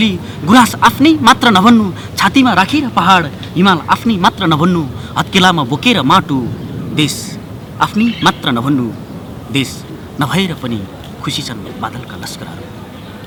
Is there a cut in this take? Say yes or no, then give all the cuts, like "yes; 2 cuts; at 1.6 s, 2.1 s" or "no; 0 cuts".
no; 0 cuts